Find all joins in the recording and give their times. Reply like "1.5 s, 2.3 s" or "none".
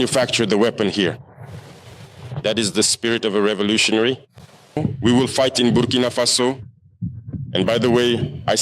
4.8 s